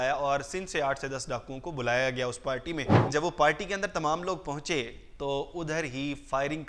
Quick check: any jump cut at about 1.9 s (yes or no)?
no